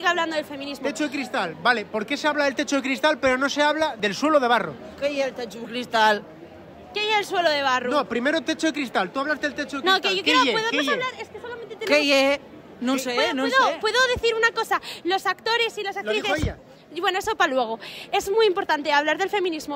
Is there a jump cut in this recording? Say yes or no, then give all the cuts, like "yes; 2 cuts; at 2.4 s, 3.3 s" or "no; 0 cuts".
no; 0 cuts